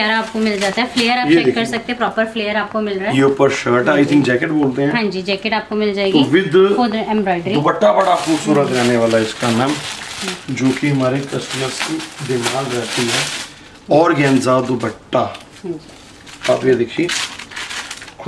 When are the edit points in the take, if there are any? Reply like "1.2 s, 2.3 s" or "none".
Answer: none